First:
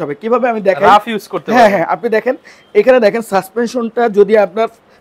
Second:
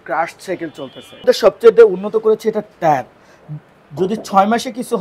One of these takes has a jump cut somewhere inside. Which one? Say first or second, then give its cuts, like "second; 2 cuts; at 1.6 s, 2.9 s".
second; 1 cut; at 1.2 s